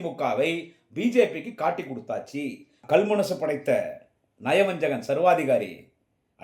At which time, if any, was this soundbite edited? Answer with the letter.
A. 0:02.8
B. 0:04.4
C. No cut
A